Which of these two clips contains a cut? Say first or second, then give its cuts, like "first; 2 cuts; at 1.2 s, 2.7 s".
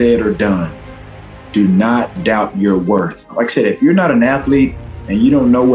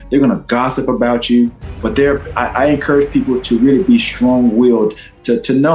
first; 1 cut; at 3.3 s